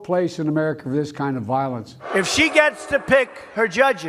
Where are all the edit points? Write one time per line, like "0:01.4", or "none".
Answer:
0:02.0

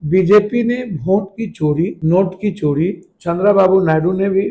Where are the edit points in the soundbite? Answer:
0:02.0
0:03.1

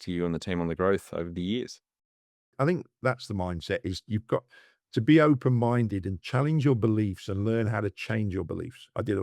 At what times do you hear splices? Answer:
0:02.5

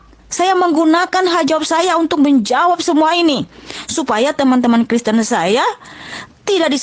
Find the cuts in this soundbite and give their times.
none

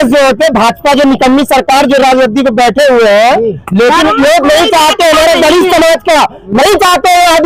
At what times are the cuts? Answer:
none

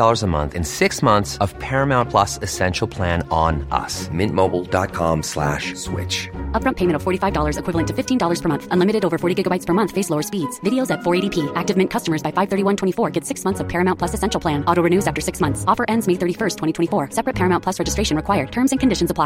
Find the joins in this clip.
none

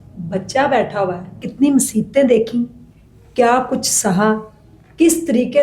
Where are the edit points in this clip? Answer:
0:01.5

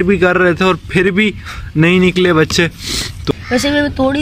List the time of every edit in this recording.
0:03.3

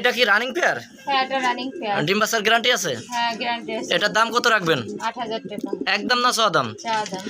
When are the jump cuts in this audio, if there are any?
none

